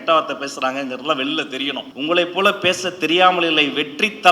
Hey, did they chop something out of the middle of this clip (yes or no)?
yes